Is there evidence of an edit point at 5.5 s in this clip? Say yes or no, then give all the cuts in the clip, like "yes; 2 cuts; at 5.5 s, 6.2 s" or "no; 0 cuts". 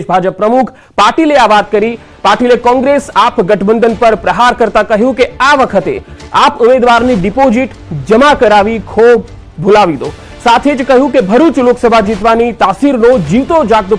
no; 1 cut; at 1.3 s